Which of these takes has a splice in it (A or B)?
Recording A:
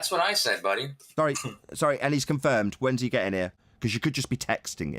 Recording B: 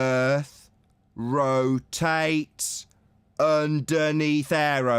A